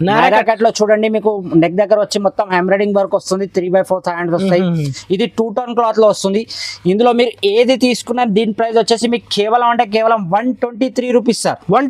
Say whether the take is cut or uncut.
uncut